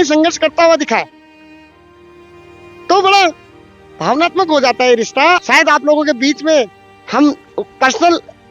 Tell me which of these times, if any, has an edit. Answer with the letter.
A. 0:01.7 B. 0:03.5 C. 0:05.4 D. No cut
C